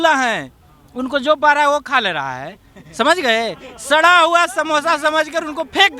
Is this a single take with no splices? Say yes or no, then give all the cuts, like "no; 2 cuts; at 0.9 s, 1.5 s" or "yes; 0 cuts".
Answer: yes; 0 cuts